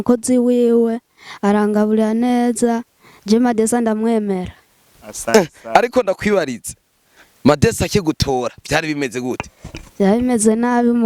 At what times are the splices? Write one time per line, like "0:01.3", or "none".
none